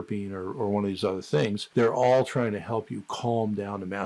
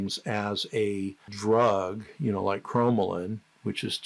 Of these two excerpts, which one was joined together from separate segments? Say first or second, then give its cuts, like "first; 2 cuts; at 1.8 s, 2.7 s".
second; 1 cut; at 1.2 s